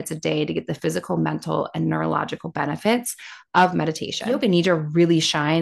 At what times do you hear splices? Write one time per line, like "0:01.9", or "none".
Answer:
0:04.2